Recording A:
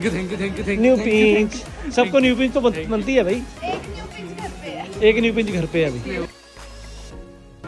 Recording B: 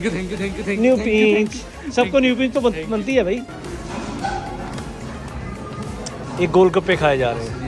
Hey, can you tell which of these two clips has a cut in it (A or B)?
B